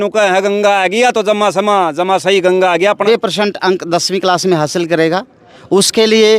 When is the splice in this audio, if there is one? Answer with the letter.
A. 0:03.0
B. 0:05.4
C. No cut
A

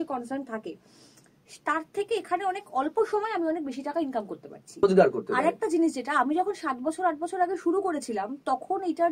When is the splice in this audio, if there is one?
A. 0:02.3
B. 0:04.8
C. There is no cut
B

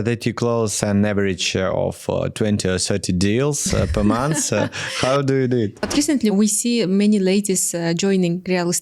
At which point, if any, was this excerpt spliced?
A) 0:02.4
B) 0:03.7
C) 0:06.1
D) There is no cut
C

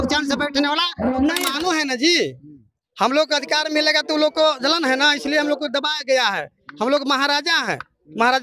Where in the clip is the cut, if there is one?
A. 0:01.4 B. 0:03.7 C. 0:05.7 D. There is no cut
A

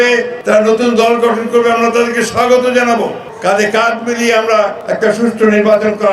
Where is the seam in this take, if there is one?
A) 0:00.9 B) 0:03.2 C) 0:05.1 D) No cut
B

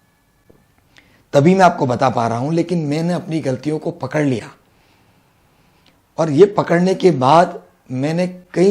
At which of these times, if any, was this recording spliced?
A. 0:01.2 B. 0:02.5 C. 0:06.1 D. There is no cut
D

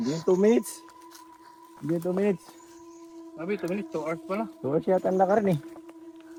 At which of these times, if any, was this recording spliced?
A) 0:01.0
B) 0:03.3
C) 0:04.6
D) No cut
D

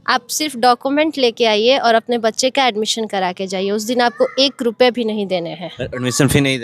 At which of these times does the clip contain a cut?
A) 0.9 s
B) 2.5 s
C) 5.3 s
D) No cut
D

